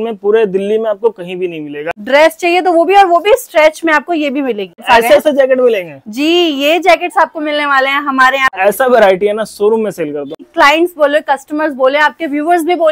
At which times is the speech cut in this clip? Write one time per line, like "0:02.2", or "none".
0:01.9
0:04.8
0:08.5
0:10.4